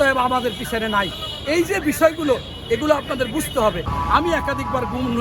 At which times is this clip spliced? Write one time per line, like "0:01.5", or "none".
0:04.0